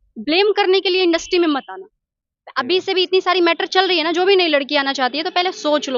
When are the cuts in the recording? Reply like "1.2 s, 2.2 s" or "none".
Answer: none